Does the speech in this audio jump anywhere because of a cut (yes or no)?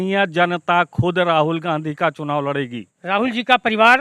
yes